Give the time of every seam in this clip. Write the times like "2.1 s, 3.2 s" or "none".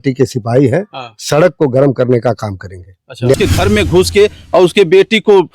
3.3 s

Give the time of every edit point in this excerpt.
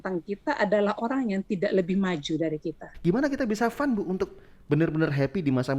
2.9 s

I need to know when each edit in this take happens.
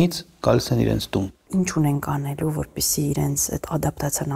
1.4 s

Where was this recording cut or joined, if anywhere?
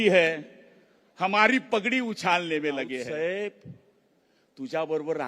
3.0 s

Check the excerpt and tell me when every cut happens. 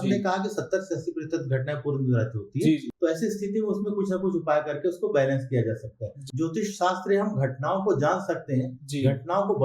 2.9 s, 6.2 s

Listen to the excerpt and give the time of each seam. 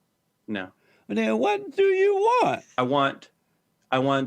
2.7 s

